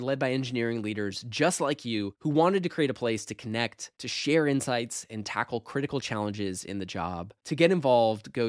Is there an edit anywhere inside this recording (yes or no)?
no